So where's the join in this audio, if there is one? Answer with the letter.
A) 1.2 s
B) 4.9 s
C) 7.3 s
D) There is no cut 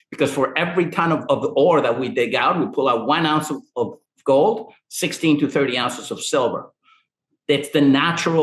A